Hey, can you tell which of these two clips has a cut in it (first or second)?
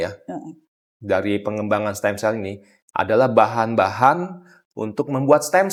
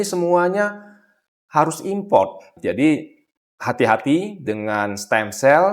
second